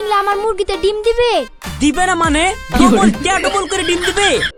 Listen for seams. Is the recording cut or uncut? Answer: uncut